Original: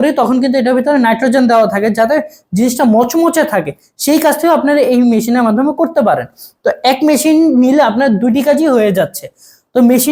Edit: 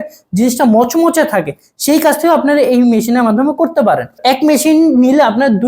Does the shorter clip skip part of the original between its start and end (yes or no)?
yes